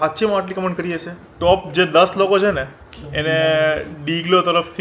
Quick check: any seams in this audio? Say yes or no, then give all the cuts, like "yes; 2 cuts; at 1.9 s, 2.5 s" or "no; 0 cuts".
yes; 1 cut; at 1.2 s